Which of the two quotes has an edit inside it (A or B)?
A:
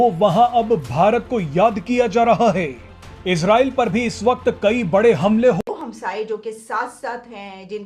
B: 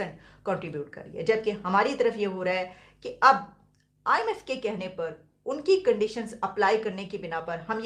A